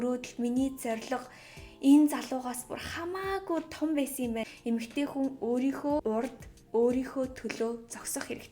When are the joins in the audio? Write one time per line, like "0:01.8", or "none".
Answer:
0:04.5
0:06.0